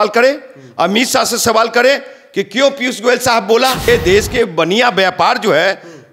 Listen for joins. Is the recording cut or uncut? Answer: cut